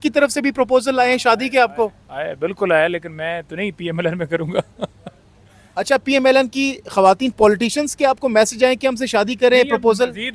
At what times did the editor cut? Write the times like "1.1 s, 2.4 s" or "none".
none